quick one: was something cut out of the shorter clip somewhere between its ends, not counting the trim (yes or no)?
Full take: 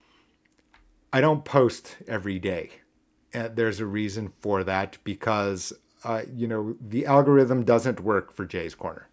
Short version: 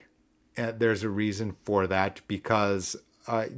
no